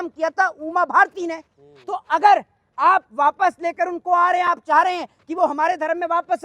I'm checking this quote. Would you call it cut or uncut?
uncut